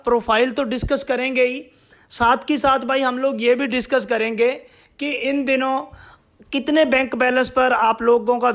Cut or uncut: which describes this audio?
uncut